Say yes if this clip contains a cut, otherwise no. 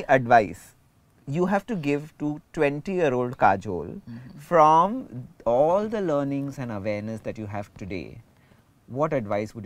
no